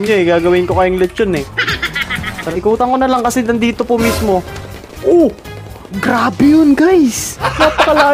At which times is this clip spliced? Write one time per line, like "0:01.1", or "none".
0:02.5